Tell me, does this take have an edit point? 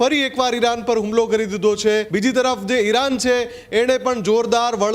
yes; 1 cut; at 2.1 s

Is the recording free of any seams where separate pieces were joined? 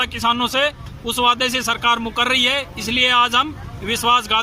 yes; 0 cuts

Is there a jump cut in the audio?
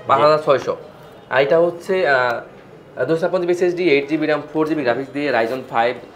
no; 0 cuts

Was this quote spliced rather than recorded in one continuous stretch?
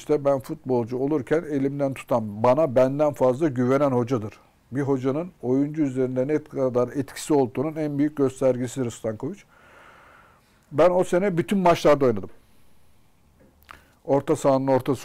no; 0 cuts

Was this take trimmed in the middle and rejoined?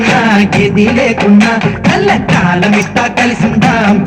no; 0 cuts

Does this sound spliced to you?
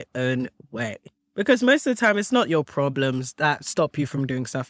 no; 0 cuts

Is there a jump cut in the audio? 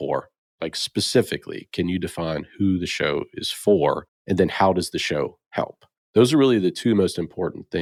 no; 0 cuts

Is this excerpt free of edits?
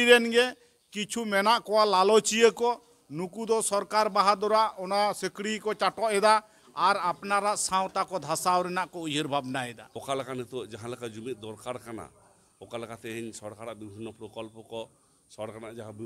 no; 1 cut; at 9.9 s

